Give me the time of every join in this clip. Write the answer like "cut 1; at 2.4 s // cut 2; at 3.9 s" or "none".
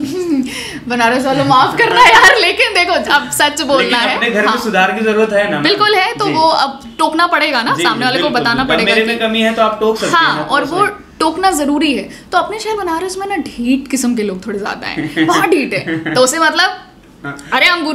none